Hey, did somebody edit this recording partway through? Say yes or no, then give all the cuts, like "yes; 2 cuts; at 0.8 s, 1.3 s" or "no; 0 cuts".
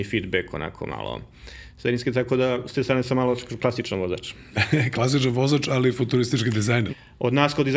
yes; 1 cut; at 6.9 s